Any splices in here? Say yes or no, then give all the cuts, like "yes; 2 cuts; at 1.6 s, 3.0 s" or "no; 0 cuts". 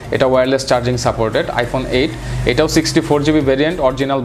no; 0 cuts